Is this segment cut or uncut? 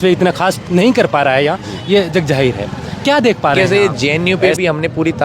cut